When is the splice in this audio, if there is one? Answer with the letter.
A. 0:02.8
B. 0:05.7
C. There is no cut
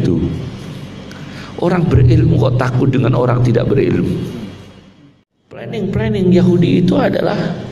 B